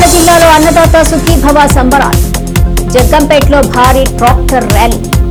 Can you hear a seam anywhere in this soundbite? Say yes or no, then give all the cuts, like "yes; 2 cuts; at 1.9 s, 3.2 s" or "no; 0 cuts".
no; 0 cuts